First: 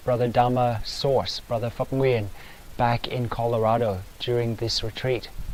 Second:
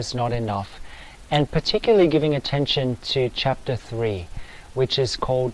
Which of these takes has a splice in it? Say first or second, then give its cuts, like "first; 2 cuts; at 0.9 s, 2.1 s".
second; 1 cut; at 3.8 s